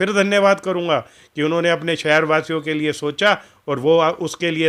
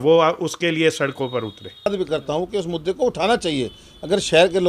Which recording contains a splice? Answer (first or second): second